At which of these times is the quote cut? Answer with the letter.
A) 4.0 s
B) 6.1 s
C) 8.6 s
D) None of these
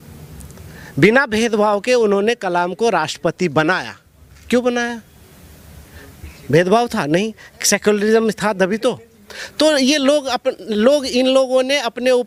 D